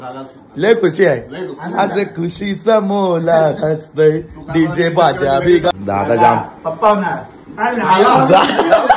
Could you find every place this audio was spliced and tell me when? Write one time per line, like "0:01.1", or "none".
0:05.7